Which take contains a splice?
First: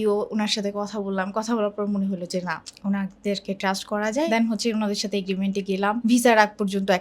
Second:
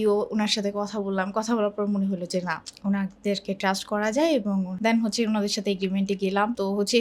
first; 2 cuts; at 4.3 s, 6.0 s

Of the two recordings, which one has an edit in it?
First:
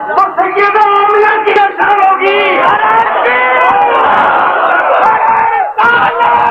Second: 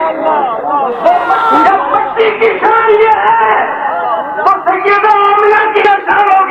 second; 1 cut; at 1.4 s

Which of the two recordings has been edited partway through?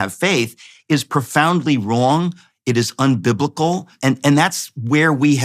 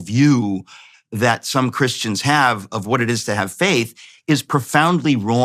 first; 1 cut; at 3.9 s

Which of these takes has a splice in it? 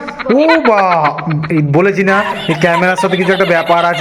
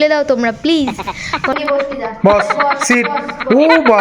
second; 1 cut; at 1.5 s

